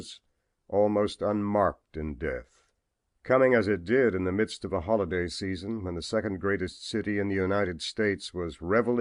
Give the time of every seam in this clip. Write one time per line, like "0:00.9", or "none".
none